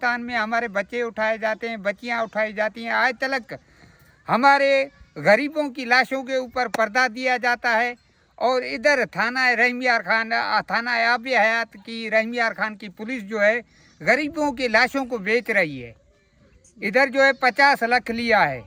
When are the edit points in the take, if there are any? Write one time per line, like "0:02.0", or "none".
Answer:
none